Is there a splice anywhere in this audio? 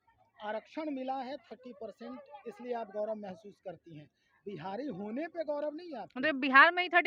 no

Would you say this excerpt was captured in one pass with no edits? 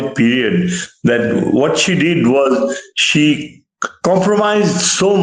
yes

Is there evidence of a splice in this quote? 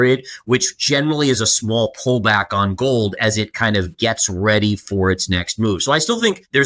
no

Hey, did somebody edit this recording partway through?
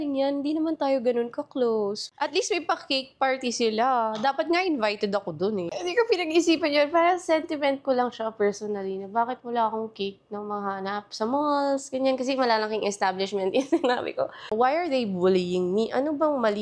yes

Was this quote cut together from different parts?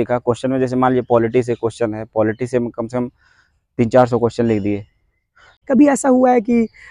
yes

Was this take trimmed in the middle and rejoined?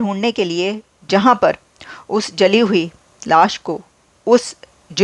no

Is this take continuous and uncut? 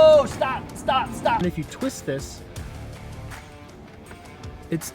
no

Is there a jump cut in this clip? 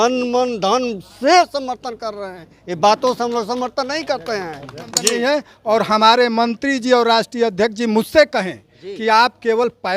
yes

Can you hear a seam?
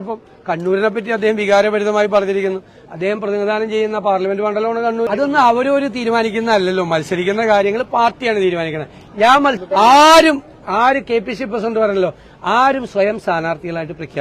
yes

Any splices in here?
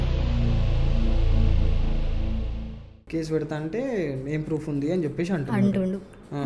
yes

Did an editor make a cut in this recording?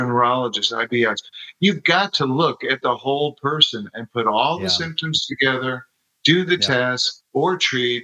no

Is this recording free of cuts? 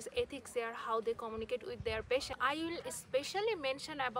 no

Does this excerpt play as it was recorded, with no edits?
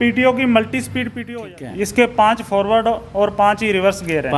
no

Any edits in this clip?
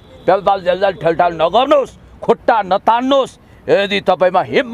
no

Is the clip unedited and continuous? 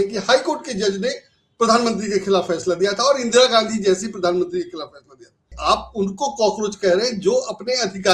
no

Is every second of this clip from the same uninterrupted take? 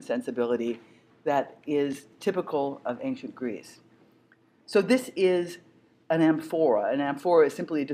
no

